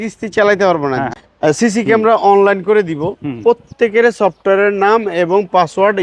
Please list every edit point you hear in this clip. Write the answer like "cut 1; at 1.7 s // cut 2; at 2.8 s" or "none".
cut 1; at 1.1 s